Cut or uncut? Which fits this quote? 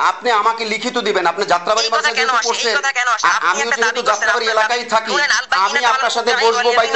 uncut